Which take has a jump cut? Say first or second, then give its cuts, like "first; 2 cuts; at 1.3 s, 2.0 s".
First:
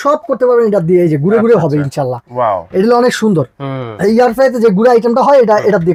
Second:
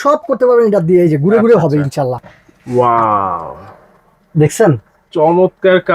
second; 1 cut; at 2.2 s